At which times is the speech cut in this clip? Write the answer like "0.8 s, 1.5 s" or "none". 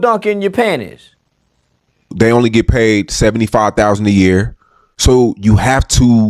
2.1 s